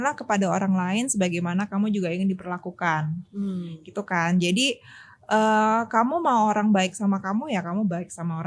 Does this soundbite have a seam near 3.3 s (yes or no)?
no